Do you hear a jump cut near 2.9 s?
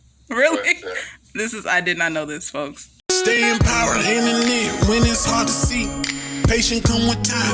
yes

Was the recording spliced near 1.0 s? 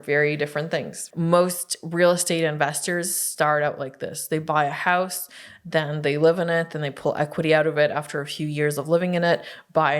yes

